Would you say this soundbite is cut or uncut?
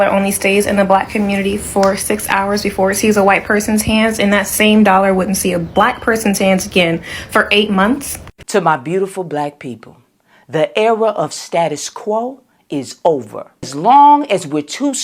cut